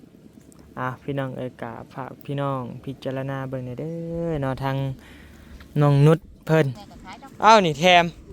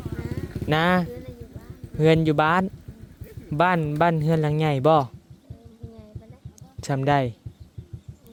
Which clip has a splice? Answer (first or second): first